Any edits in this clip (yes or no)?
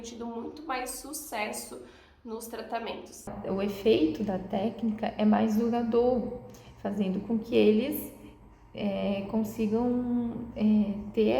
yes